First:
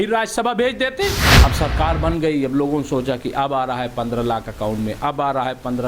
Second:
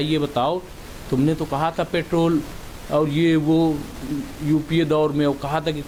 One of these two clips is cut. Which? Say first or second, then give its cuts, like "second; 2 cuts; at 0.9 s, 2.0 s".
first; 1 cut; at 1.3 s